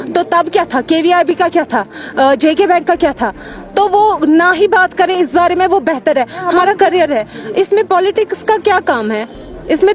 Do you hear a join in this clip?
yes; 1 cut; at 6.5 s

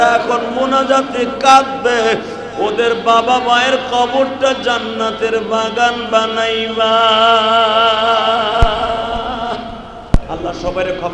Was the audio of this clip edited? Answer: no; 0 cuts

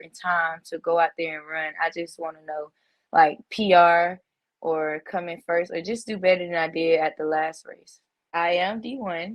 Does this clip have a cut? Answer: yes; 1 cut; at 8.3 s

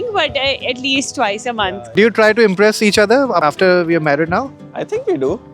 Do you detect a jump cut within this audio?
yes; 2 cuts; at 1.9 s, 3.4 s

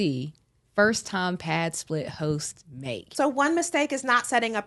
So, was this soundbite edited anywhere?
yes; 1 cut; at 3.1 s

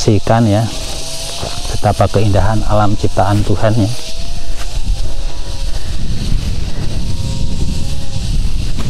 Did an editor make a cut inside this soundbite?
no; 0 cuts

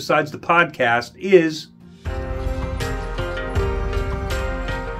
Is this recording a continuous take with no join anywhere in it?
no; 1 cut; at 2.0 s

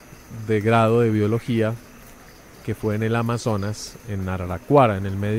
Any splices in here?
no; 0 cuts

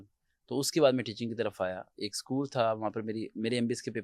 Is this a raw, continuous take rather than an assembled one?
yes; 0 cuts

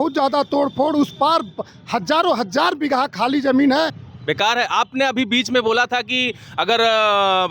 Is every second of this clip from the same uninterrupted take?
no; 1 cut; at 4.0 s

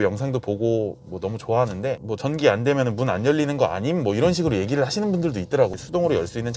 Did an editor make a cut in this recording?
no; 0 cuts

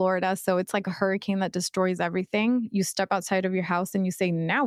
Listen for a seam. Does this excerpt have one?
no; 0 cuts

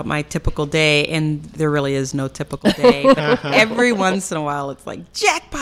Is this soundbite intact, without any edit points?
yes; 0 cuts

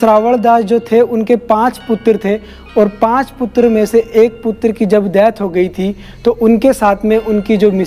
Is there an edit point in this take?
no; 0 cuts

